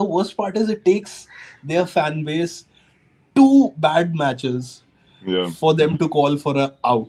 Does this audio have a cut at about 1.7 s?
no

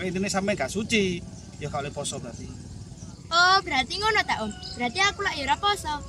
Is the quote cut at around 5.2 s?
no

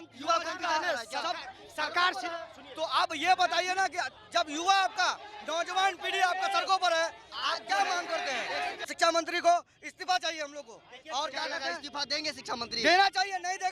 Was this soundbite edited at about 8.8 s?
yes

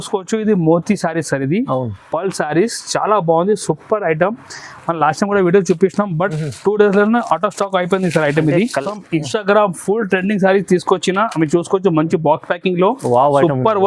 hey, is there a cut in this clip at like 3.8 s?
no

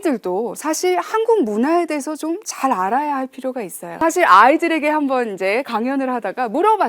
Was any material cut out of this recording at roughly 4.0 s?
yes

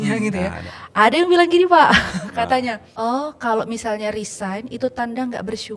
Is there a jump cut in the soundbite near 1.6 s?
no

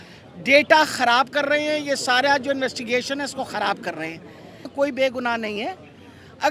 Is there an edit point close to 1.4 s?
no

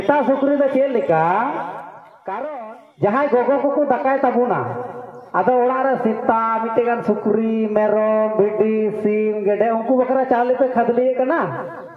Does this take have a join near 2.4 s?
yes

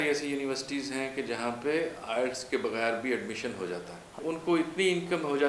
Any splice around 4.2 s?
yes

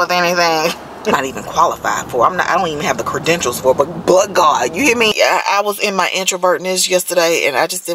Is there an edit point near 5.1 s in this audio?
yes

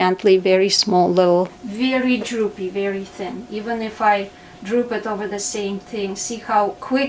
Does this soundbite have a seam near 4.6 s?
no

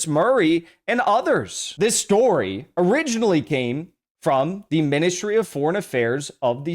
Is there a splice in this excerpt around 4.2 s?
no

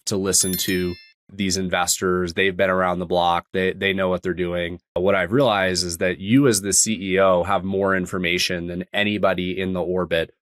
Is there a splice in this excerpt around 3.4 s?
no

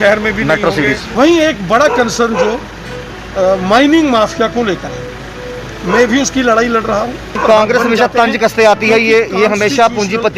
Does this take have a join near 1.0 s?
yes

